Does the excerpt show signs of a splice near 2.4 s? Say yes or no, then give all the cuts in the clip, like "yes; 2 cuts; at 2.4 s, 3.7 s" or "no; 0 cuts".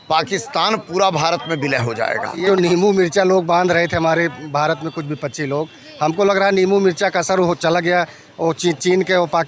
yes; 1 cut; at 2.4 s